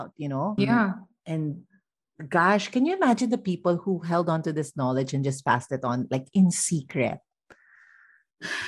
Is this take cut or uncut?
uncut